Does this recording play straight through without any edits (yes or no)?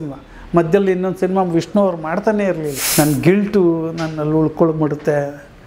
no